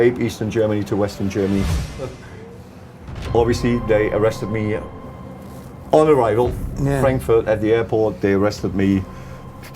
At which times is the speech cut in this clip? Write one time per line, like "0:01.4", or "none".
0:02.1